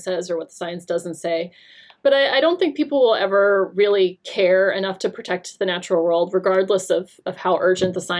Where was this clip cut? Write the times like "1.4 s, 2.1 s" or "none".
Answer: none